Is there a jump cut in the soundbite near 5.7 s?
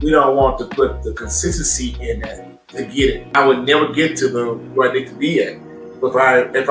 no; 1 cut; at 3.2 s

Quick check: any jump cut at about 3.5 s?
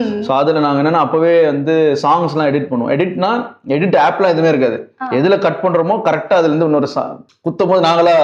no; 1 cut; at 7.2 s

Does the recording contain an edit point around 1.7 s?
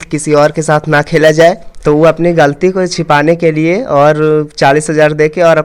yes; 1 cut; at 1.7 s

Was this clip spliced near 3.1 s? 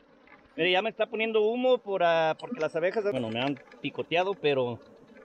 yes; 1 cut; at 3.1 s

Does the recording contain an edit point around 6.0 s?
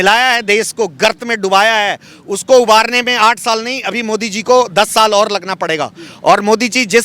no; 0 cuts

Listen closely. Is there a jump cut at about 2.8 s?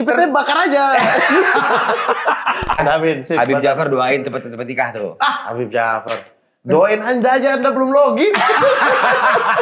yes; 1 cut; at 2.8 s

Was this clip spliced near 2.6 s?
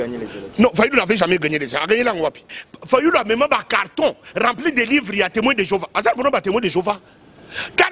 yes; 1 cut; at 2.6 s

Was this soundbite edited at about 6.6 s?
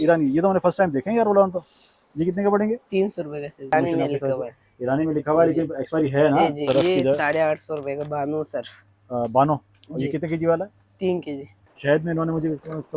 yes; 3 cuts; at 3.7 s, 6.6 s, 11.6 s

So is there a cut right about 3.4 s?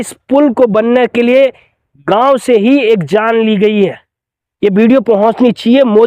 no; 1 cut; at 4.7 s

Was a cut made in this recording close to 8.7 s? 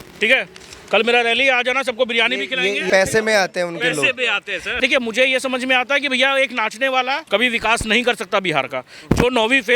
no; 3 cuts; at 2.8 s, 4.7 s, 7.2 s

